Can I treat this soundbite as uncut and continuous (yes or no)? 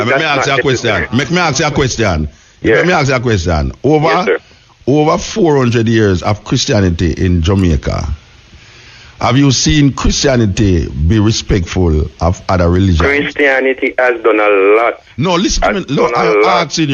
yes